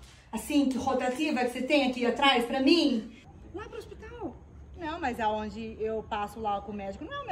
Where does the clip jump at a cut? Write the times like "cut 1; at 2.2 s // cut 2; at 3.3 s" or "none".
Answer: cut 1; at 3.2 s